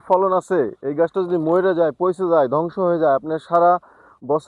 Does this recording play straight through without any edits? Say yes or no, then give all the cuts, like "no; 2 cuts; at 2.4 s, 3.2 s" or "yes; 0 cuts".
yes; 0 cuts